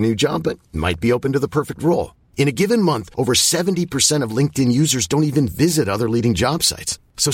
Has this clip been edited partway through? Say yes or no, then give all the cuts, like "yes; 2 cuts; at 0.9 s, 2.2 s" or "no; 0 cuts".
no; 0 cuts